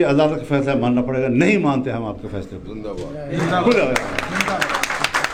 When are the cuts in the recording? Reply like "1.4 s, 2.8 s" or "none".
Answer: none